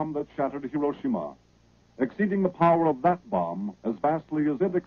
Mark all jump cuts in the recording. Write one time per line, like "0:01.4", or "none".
none